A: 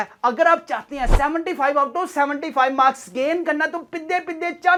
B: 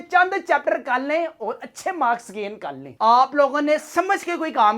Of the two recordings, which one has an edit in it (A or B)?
B